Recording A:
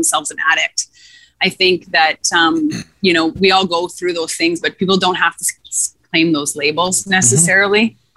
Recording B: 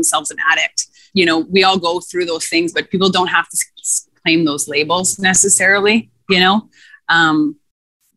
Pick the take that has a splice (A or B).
B